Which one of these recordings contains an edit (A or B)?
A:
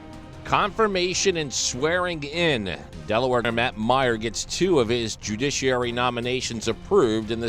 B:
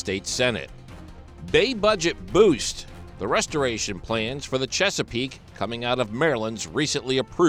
A